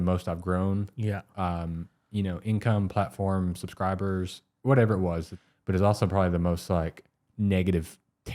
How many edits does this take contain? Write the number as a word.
two